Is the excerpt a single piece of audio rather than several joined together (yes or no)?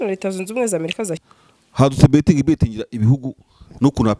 no